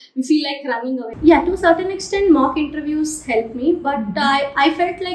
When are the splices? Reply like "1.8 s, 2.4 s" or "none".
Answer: 1.1 s